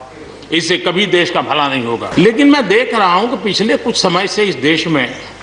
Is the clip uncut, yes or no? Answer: no